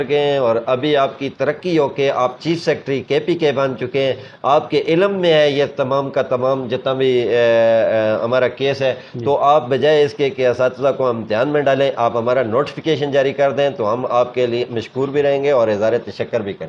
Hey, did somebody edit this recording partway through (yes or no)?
no